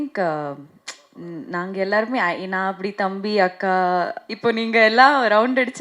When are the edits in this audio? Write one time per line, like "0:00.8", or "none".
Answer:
0:04.2